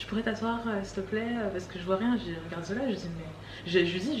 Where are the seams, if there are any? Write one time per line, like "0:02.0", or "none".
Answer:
none